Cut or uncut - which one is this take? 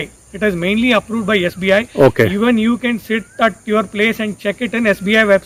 uncut